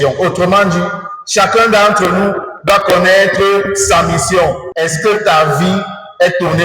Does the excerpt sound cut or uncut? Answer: cut